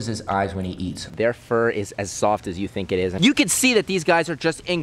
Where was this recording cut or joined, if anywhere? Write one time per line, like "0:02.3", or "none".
0:01.1
0:03.4